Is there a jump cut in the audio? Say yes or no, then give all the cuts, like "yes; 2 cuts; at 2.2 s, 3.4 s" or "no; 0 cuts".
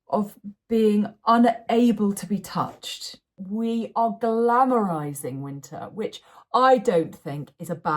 yes; 1 cut; at 3.3 s